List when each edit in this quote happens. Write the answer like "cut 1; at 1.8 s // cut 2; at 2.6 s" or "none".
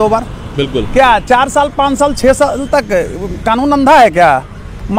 none

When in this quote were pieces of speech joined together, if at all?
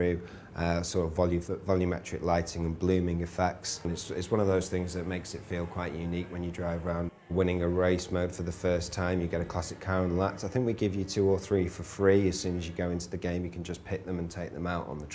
cut 1; at 11.1 s

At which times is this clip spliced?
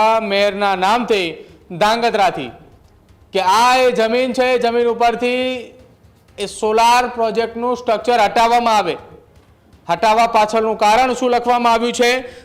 none

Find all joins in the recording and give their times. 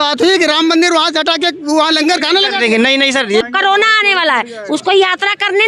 cut 1; at 3.4 s

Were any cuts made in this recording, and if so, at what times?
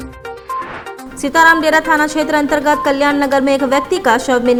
none

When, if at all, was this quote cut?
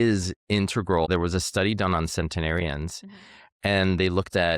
cut 1; at 1.1 s

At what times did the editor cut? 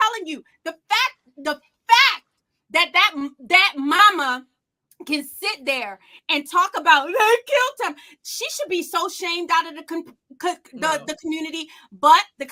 none

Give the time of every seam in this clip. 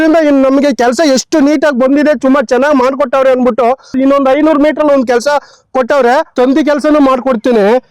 cut 1; at 4.0 s // cut 2; at 6.3 s

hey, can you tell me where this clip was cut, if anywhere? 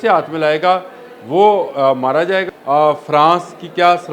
cut 1; at 2.5 s

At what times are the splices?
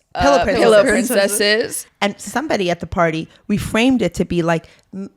cut 1; at 1.8 s

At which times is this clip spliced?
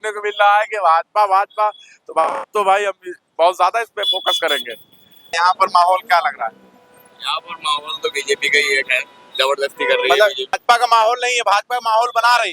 cut 1; at 5.3 s // cut 2; at 10.6 s

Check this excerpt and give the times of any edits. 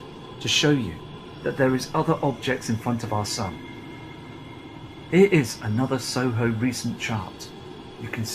none

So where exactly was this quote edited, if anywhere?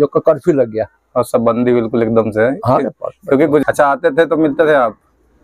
cut 1; at 3.6 s

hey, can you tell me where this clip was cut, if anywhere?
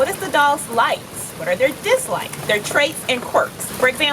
cut 1; at 2.3 s

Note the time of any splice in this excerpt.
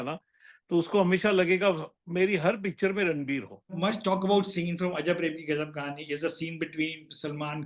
cut 1; at 3.7 s

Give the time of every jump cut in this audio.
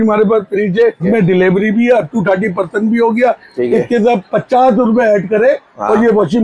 cut 1; at 1.0 s

